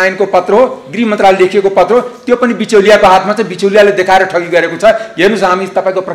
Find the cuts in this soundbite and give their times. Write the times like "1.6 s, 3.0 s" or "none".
none